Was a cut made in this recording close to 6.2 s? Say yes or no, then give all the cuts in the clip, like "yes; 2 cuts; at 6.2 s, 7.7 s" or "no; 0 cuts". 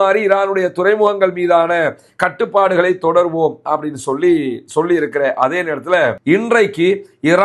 yes; 1 cut; at 6.2 s